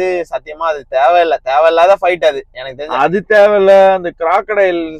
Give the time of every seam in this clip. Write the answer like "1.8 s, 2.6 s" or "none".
none